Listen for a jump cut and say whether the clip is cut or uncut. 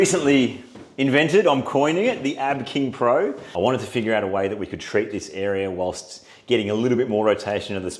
cut